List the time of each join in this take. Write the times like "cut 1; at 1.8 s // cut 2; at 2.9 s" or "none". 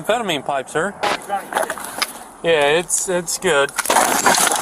cut 1; at 1.0 s